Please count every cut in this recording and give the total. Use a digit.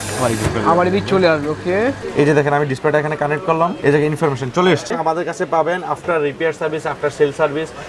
2